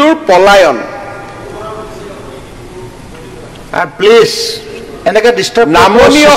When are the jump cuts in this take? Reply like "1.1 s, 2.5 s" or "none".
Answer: none